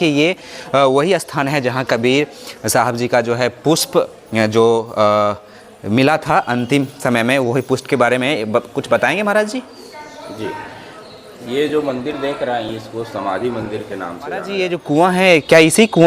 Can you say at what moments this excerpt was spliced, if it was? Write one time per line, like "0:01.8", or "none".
0:14.5